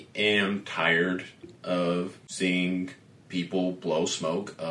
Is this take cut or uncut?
cut